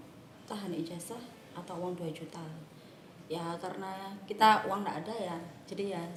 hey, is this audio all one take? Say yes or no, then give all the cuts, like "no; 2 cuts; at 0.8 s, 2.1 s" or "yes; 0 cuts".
yes; 0 cuts